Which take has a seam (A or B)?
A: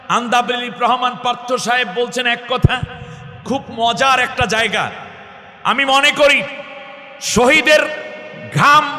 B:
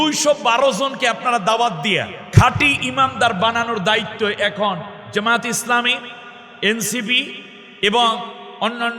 B